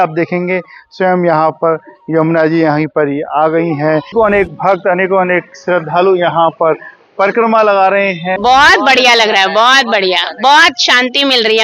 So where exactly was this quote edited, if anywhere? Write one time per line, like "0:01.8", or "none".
0:04.1
0:08.3